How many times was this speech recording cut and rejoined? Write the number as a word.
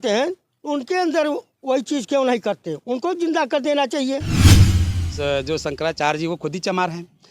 one